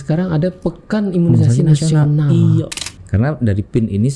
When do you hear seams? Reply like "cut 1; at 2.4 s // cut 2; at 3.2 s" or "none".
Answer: cut 1; at 2.8 s